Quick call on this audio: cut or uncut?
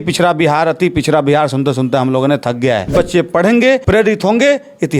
cut